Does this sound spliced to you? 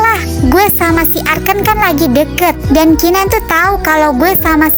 no; 0 cuts

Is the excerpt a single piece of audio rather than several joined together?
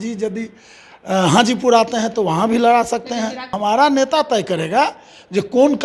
no; 1 cut; at 3.5 s

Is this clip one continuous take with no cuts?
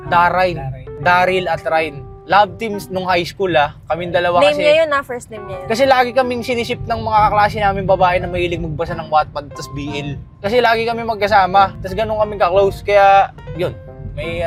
yes; 0 cuts

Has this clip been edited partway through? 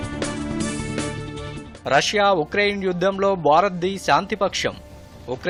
no; 0 cuts

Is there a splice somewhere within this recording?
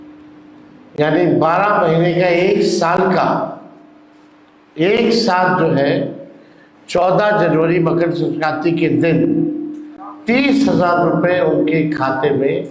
no; 0 cuts

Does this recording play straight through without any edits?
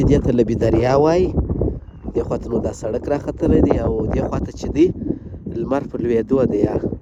yes; 0 cuts

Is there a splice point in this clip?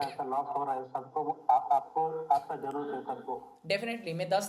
no; 0 cuts

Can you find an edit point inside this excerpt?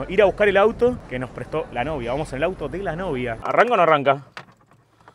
yes; 1 cut; at 3.4 s

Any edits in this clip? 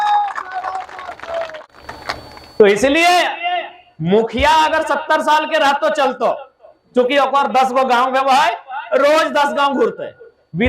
yes; 1 cut; at 1.6 s

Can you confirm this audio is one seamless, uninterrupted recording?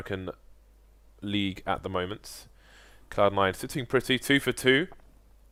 yes; 0 cuts

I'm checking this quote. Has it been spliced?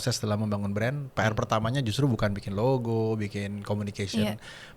no; 0 cuts

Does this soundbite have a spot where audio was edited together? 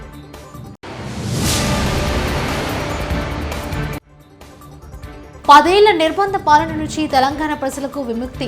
yes; 1 cut; at 5.5 s

